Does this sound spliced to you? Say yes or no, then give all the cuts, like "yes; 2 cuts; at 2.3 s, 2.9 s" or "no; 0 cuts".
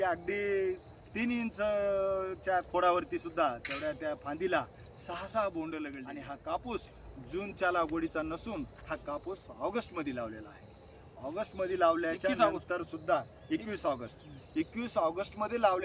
yes; 1 cut; at 6.1 s